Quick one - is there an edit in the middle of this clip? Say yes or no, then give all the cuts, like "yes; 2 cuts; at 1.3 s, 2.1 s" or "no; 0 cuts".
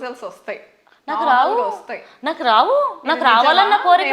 no; 0 cuts